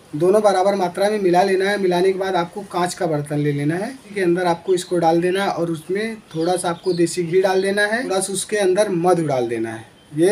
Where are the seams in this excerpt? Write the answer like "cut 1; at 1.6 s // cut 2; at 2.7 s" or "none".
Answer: cut 1; at 4.0 s // cut 2; at 8.1 s

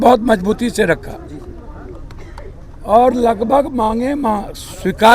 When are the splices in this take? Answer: none

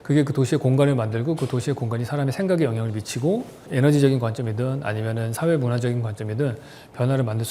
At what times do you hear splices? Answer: cut 1; at 3.7 s

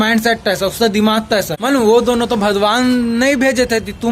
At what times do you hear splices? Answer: cut 1; at 1.5 s

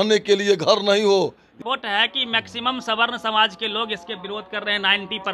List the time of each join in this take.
cut 1; at 1.6 s

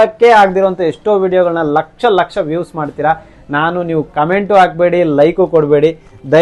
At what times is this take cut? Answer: none

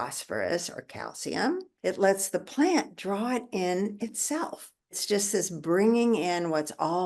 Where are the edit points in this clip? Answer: cut 1; at 1.7 s // cut 2; at 5.0 s

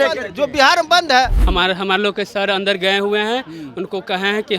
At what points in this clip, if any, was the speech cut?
cut 1; at 1.4 s

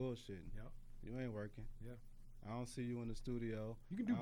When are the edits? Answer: none

